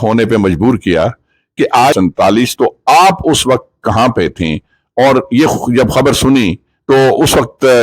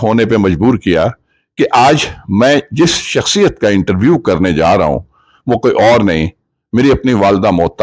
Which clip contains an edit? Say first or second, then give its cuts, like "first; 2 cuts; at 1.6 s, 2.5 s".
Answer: first; 1 cut; at 1.9 s